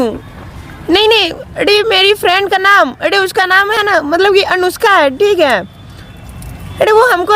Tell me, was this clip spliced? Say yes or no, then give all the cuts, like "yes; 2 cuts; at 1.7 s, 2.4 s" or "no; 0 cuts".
no; 0 cuts